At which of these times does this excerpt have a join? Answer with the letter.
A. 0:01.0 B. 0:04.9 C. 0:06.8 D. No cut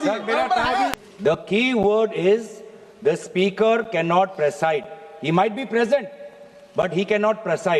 A